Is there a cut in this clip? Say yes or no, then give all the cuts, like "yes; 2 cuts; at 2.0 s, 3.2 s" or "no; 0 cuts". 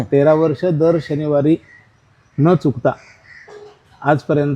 no; 0 cuts